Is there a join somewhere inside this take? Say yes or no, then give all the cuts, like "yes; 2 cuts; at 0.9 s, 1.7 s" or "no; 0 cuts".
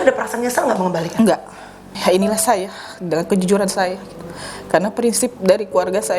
yes; 1 cut; at 2.0 s